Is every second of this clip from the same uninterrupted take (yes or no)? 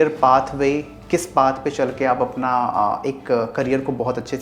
yes